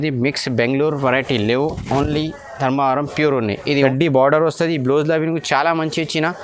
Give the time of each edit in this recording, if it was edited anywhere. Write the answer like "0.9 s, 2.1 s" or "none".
3.7 s

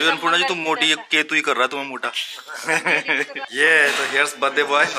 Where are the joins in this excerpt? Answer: 3.4 s

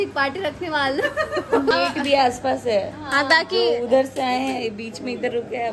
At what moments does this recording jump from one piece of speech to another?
1.7 s

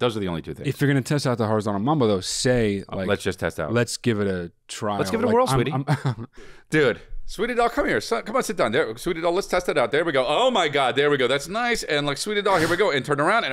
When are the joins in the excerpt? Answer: 6.6 s

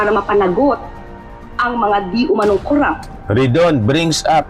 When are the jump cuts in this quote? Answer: 3.2 s

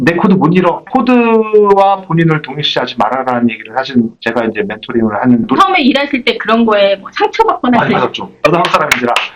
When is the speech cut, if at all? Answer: 0.8 s, 5.5 s, 8.3 s

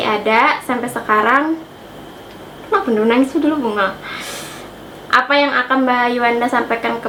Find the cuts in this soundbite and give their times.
none

